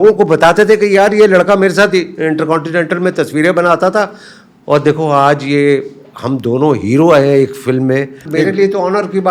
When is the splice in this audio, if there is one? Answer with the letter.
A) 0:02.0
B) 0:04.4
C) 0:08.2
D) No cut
C